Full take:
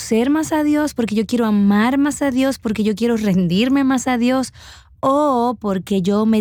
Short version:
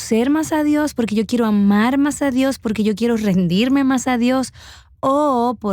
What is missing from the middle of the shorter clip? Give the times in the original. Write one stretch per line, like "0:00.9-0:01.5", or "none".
none